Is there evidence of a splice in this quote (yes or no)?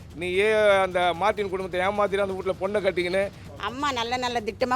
yes